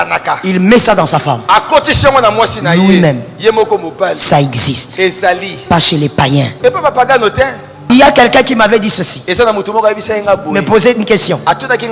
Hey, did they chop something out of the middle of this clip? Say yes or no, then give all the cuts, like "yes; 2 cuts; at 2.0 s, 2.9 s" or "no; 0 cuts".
yes; 1 cut; at 7.8 s